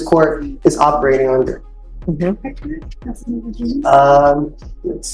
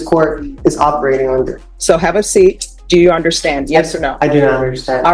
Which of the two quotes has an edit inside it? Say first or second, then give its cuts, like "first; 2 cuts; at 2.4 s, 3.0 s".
second; 2 cuts; at 1.7 s, 2.7 s